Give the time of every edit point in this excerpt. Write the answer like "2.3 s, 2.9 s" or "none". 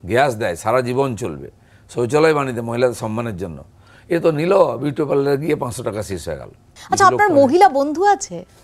6.7 s